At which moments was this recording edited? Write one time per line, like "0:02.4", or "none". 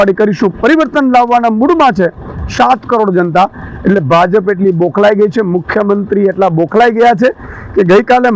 none